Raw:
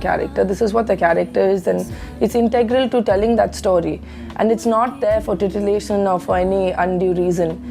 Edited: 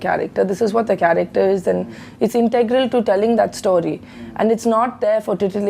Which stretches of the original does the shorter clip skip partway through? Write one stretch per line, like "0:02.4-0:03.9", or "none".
none